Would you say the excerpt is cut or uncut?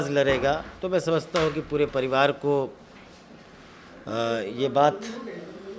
uncut